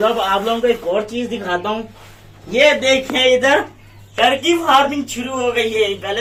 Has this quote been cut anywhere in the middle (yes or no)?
no